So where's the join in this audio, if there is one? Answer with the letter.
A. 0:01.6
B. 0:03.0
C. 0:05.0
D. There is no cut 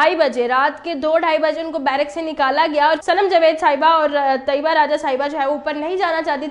B